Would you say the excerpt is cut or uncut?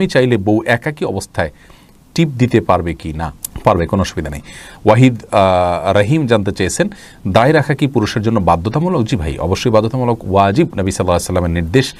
uncut